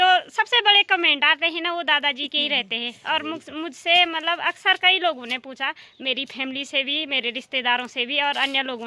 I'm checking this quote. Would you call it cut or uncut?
uncut